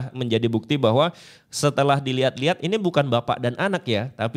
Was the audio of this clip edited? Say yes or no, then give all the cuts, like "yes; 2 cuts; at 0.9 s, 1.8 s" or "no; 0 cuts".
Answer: no; 0 cuts